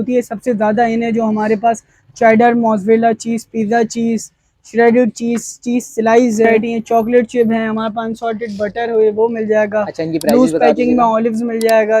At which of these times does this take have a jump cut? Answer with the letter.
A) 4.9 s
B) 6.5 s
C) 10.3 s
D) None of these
B